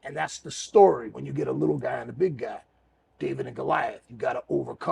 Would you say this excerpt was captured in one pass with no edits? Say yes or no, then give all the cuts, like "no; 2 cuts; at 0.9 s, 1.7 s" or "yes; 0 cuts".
yes; 0 cuts